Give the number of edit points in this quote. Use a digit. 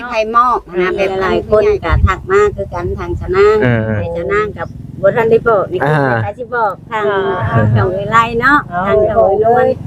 1